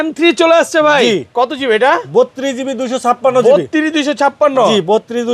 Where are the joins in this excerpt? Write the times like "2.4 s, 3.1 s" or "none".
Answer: none